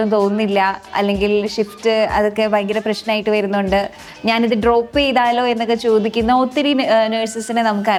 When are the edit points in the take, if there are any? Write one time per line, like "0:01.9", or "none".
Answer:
none